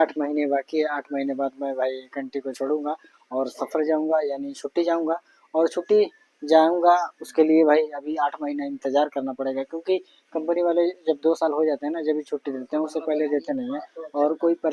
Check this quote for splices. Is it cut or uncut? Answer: uncut